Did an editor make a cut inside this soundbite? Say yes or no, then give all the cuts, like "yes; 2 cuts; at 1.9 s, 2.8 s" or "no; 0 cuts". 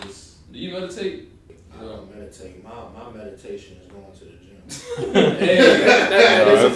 yes; 1 cut; at 1.4 s